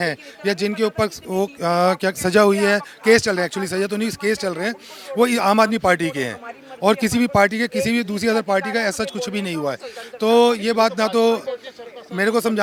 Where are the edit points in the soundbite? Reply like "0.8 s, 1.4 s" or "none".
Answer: none